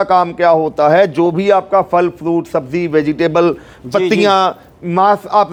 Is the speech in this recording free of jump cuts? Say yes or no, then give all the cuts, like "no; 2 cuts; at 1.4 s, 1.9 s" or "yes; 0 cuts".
yes; 0 cuts